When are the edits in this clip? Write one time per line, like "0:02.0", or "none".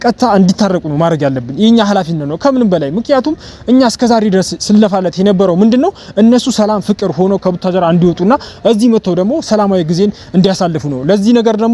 none

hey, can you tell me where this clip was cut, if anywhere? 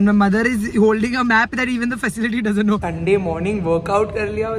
0:02.9

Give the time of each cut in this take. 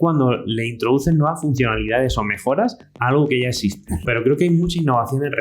0:04.0

